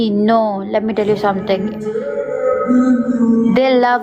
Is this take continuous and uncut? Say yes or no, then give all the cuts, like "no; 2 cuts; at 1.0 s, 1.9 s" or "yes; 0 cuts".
yes; 0 cuts